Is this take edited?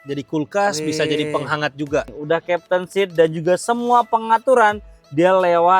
yes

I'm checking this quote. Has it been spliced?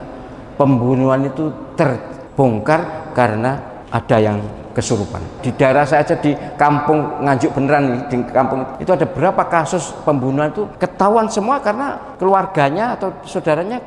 yes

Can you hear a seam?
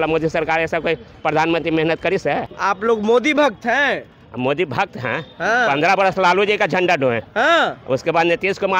yes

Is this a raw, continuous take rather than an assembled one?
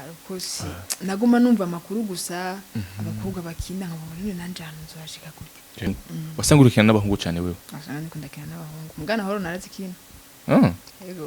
no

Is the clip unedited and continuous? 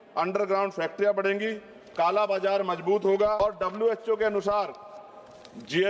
no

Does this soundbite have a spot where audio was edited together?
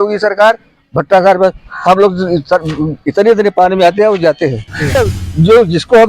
yes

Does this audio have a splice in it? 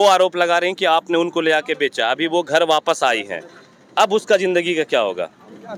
no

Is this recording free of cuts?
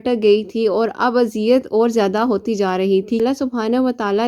no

